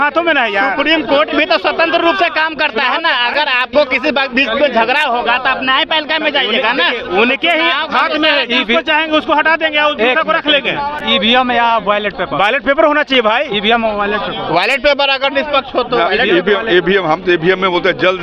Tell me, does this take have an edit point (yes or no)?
no